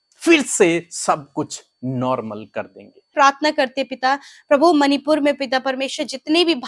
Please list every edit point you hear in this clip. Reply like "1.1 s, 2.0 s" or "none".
3.1 s